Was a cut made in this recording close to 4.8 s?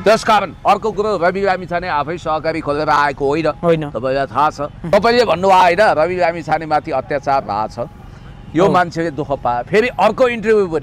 yes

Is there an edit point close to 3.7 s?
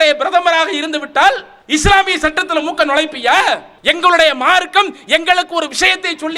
yes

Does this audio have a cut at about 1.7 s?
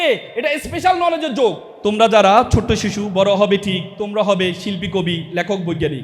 yes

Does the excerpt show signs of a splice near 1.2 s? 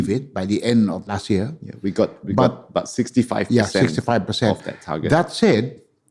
yes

